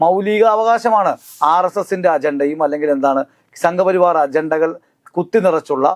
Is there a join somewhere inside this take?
yes; 1 cut; at 1.3 s

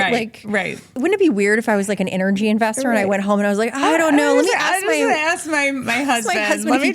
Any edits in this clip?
yes; 1 cut; at 0.9 s

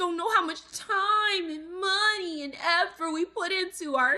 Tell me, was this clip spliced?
no; 0 cuts

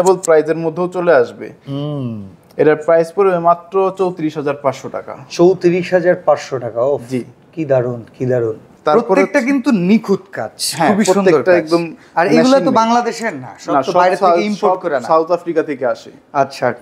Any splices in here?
no; 0 cuts

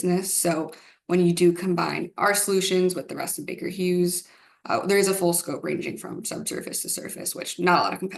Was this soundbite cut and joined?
no; 0 cuts

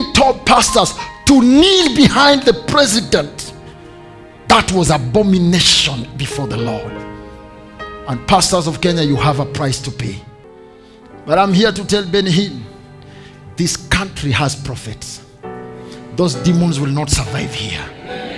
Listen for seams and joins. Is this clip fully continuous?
no; 1 cut; at 10.5 s

